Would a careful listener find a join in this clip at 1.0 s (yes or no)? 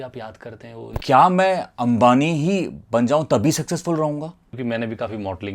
yes